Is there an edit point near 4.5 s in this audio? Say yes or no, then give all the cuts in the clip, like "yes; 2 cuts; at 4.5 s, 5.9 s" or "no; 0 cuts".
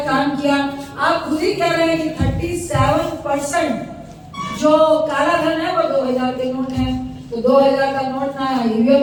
no; 0 cuts